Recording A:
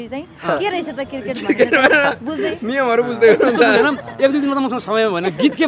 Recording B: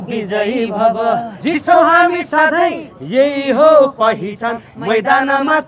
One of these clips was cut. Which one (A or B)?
B